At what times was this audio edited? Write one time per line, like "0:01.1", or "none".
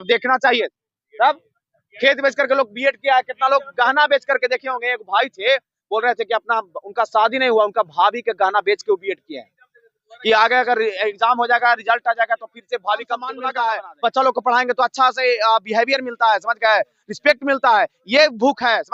0:13.4